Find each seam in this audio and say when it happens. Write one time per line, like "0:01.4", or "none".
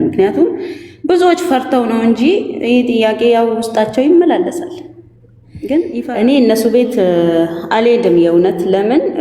0:06.0